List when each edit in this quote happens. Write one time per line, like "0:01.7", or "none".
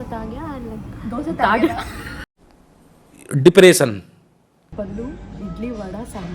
0:04.7